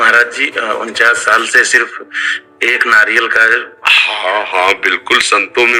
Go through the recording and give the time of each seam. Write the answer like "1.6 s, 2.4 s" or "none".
none